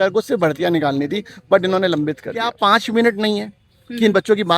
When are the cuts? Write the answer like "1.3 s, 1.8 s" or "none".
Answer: 2.5 s